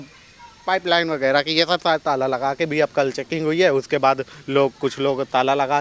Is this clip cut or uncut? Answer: uncut